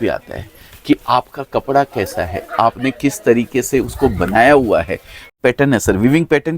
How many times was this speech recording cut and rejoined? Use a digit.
1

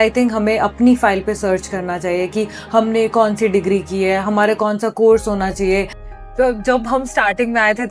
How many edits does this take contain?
1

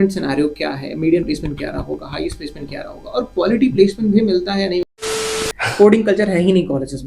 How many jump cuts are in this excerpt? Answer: 1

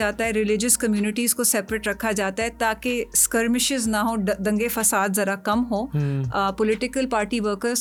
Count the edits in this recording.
0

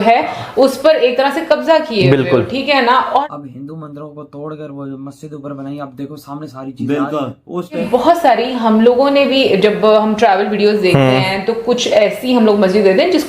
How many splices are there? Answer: 2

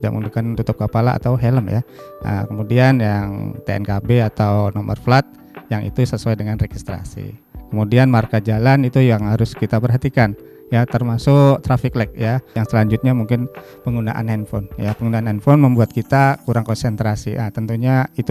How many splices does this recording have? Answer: 1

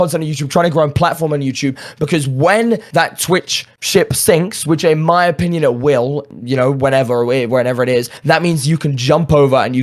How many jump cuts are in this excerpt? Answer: 0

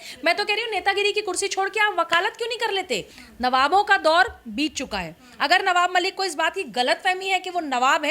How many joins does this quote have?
1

